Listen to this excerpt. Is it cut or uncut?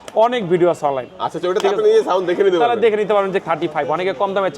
cut